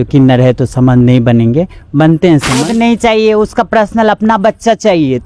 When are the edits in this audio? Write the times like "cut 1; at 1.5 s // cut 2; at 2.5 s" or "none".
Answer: cut 1; at 2.6 s